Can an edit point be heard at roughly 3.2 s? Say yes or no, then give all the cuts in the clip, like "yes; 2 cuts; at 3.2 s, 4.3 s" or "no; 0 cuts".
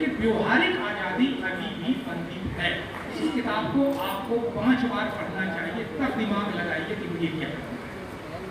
yes; 1 cut; at 3.2 s